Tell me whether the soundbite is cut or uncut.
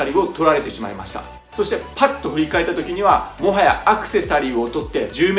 uncut